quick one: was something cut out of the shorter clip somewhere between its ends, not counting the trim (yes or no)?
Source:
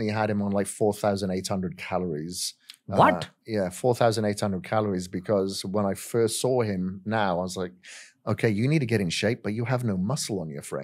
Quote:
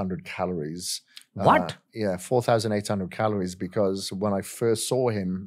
no